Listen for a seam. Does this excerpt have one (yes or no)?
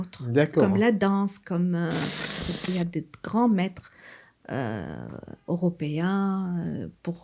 yes